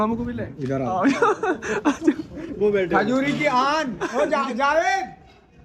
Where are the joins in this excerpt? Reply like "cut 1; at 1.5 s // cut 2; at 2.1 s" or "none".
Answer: none